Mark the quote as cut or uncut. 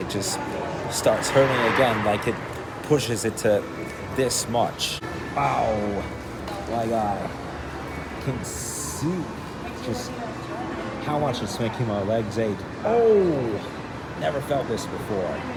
uncut